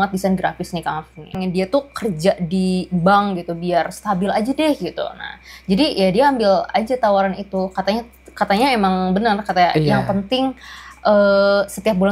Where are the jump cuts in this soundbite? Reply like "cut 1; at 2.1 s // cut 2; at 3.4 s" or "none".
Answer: cut 1; at 1.3 s